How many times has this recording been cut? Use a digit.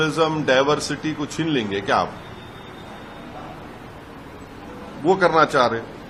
0